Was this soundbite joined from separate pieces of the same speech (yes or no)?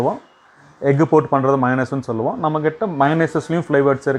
no